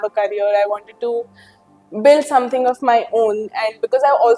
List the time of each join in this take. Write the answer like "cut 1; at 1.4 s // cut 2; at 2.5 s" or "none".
none